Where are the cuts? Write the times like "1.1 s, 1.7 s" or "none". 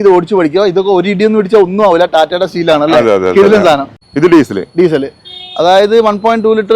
4.0 s